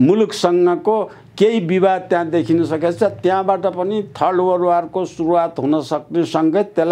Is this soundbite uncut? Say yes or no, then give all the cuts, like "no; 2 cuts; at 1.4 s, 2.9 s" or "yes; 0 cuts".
yes; 0 cuts